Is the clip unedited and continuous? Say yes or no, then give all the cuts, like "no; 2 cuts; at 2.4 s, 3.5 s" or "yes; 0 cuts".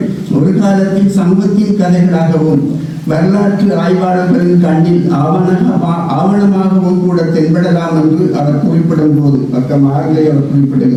yes; 0 cuts